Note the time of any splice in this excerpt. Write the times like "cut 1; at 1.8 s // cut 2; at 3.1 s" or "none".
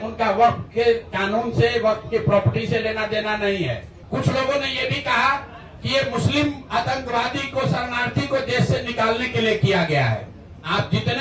none